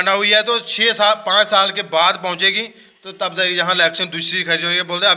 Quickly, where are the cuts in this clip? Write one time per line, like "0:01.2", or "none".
none